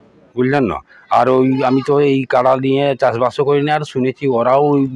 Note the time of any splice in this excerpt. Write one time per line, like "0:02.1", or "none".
none